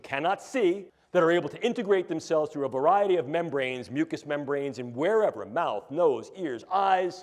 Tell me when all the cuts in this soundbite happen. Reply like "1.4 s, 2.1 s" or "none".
0.9 s